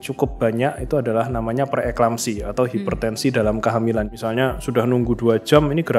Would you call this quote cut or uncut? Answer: cut